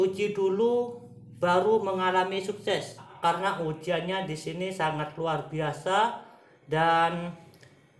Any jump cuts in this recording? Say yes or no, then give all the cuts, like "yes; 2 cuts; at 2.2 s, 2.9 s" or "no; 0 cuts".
yes; 1 cut; at 3.1 s